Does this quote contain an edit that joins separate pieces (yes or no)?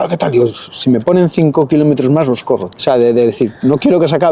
yes